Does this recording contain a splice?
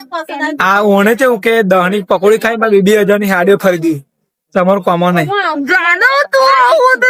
no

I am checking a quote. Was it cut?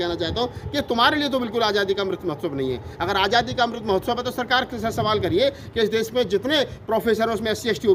no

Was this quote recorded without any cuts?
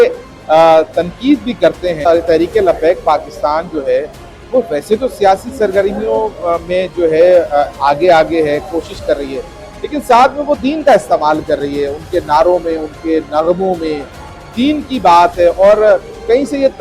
no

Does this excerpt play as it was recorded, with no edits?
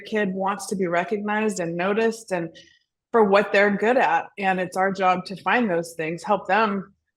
yes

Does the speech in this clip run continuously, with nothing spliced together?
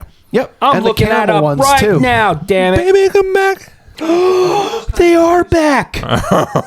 no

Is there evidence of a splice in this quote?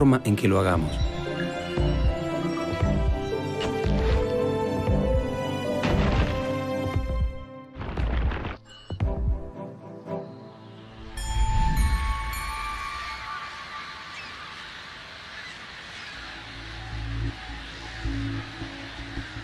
no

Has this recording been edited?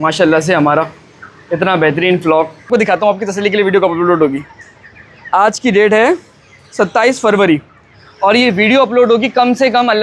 yes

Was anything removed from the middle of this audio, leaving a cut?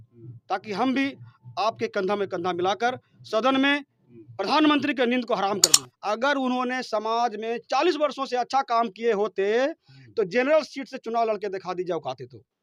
yes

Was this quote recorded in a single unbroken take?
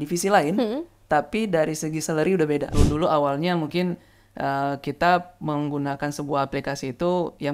no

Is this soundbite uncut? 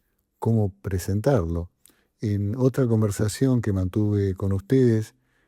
yes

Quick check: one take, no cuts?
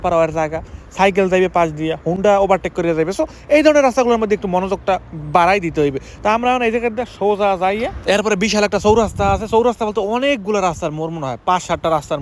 yes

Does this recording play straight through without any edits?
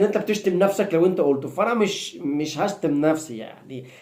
yes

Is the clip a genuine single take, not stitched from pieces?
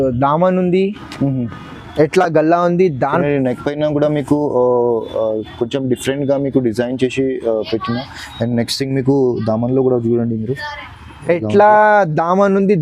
yes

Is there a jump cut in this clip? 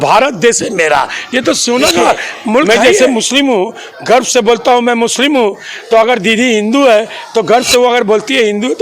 yes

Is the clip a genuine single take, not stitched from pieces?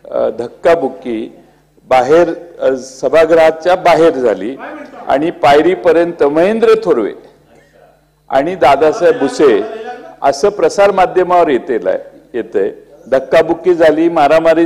yes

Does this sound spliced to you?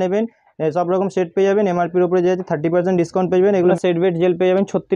yes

